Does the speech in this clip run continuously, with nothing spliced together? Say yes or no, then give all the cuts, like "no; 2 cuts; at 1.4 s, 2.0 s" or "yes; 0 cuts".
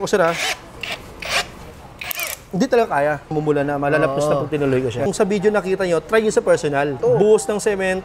no; 3 cuts; at 3.4 s, 5.1 s, 7.0 s